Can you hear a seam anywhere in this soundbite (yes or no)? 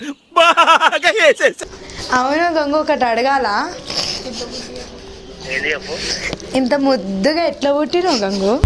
yes